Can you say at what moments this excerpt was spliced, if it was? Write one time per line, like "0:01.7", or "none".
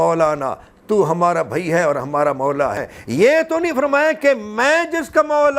0:02.9